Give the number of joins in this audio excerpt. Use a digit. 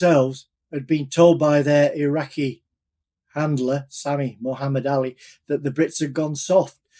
0